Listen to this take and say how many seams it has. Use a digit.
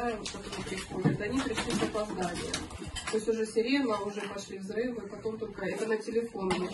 0